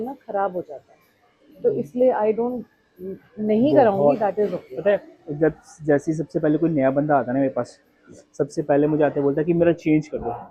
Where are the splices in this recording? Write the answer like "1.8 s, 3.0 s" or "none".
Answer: none